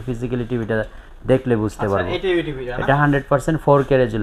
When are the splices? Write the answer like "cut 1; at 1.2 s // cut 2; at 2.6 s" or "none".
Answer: none

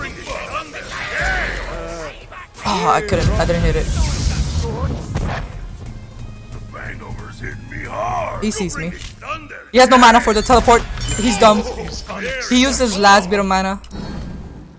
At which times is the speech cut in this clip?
none

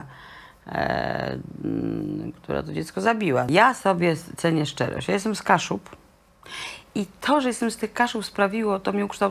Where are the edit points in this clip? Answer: cut 1; at 3.5 s

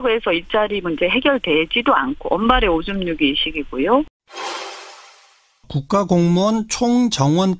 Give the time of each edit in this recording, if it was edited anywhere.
cut 1; at 4.0 s

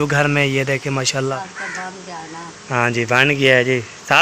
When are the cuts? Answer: cut 1; at 1.5 s

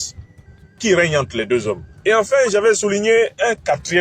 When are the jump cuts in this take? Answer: cut 1; at 1.9 s

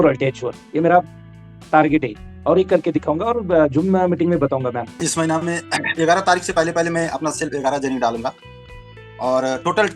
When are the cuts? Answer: cut 1; at 4.9 s

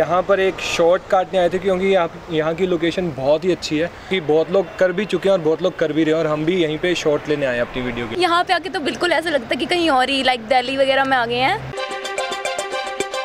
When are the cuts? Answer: cut 1; at 4.1 s // cut 2; at 8.1 s // cut 3; at 11.8 s

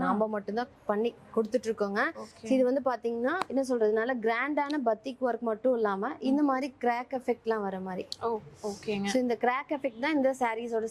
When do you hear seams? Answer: none

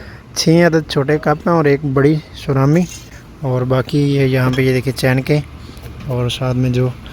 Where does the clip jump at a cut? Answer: none

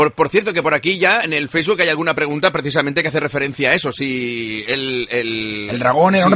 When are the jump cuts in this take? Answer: cut 1; at 5.2 s

